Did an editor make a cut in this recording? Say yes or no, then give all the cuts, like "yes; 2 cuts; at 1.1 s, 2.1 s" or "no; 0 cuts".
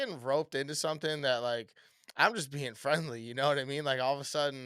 no; 0 cuts